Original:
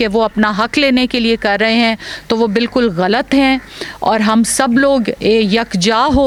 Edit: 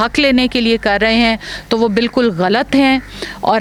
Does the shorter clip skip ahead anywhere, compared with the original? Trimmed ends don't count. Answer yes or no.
no